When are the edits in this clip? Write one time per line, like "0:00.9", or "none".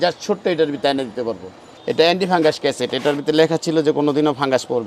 none